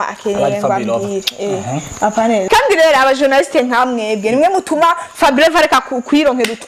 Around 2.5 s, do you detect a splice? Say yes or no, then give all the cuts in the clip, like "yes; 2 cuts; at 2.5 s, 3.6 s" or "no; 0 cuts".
yes; 1 cut; at 2.5 s